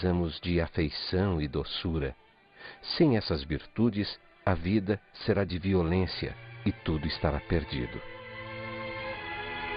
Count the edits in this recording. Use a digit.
1